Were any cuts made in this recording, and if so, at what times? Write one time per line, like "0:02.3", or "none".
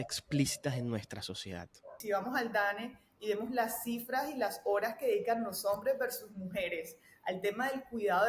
0:01.9